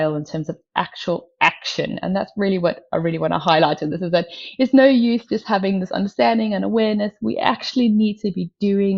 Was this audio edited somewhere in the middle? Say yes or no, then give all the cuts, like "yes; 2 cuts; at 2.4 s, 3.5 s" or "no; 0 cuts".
no; 0 cuts